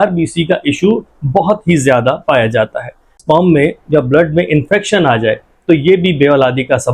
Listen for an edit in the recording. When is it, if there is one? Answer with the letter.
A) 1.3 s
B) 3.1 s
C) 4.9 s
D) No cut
B